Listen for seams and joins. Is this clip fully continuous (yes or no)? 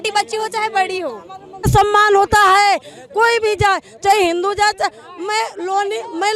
yes